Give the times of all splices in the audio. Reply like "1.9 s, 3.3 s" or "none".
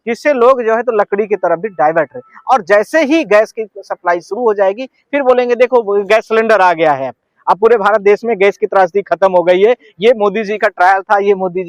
none